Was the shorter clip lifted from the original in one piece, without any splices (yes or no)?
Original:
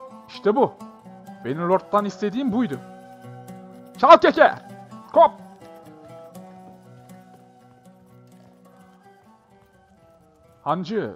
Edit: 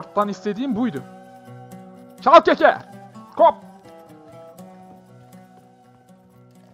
yes